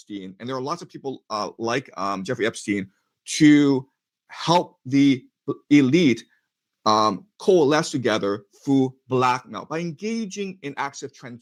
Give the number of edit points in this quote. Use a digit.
0